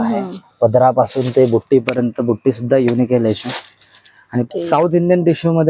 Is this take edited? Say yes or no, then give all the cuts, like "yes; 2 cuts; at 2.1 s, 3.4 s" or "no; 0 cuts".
yes; 1 cut; at 4.5 s